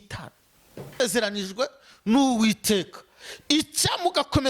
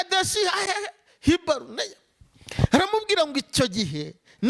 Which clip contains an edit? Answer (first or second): first